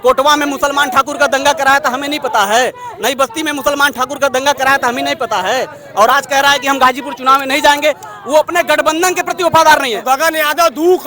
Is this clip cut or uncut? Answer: cut